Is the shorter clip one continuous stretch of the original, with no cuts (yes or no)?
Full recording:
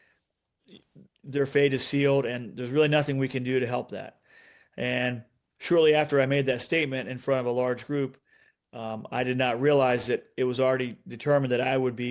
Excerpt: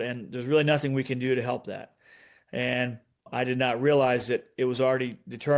no